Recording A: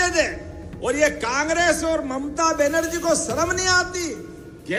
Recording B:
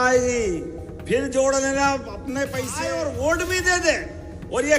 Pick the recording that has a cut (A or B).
B